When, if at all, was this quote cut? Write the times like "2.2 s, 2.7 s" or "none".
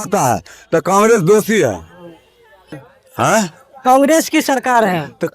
2.8 s